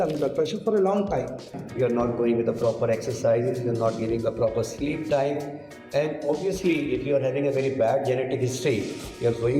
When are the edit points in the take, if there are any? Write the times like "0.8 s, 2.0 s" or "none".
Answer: 1.6 s